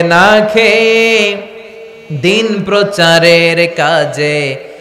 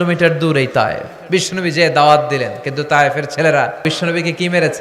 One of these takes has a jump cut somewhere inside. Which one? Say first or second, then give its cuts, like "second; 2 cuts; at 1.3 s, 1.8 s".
second; 2 cuts; at 1.1 s, 3.8 s